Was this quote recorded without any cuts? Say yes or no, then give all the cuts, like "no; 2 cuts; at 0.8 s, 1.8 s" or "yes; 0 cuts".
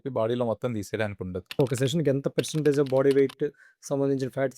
no; 1 cut; at 1.6 s